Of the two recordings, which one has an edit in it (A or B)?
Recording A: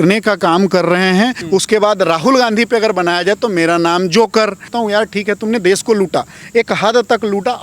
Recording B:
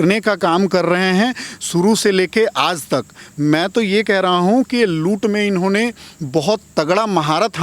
A